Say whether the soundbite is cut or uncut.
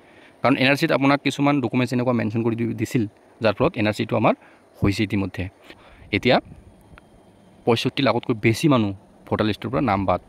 cut